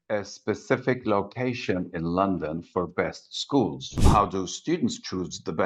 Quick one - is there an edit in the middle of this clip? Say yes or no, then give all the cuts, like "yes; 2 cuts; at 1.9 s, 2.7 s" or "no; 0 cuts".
yes; 1 cut; at 4.0 s